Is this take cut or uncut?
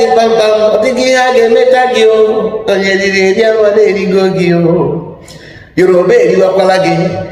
uncut